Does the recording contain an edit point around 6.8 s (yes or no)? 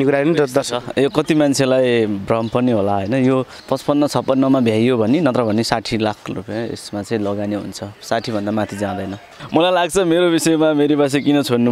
no